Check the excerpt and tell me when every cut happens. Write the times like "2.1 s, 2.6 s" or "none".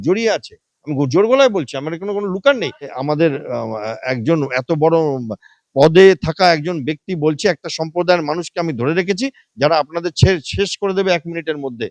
3.0 s

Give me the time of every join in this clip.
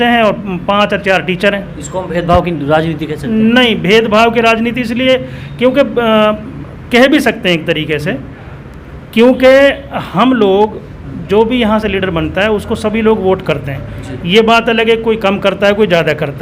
none

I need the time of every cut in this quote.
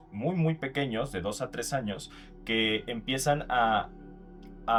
none

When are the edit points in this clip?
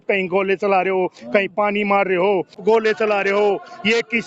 2.6 s

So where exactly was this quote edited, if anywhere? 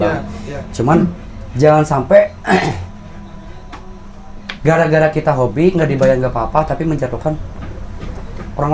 none

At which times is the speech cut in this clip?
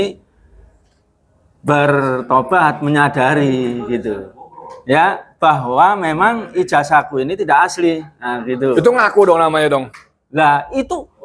none

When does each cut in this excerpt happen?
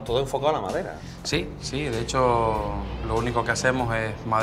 none

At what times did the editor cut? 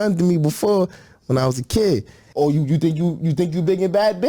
2.2 s

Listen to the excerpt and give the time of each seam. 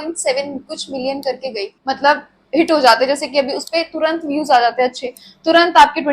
1.7 s

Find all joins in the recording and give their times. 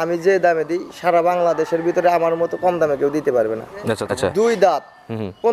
3.9 s

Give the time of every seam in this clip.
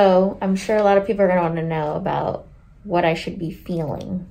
none

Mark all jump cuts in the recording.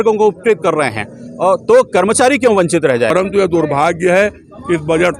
3.1 s

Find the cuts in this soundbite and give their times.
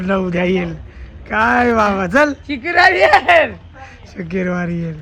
none

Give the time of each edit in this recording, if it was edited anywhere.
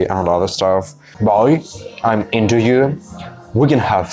1.1 s

